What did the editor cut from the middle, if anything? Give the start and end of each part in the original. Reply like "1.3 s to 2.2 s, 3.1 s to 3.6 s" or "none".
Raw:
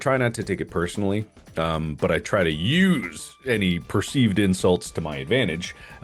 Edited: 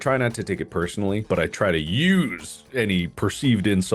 1.2 s to 2.0 s